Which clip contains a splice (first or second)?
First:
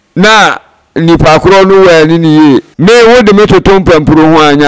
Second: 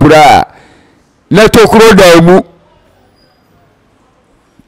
first